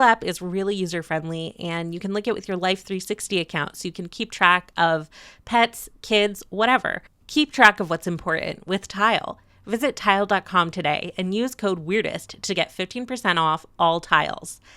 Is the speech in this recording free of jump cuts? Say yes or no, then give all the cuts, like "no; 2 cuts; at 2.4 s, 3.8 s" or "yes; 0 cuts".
no; 1 cut; at 7.1 s